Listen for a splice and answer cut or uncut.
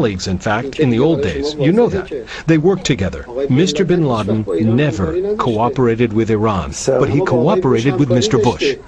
uncut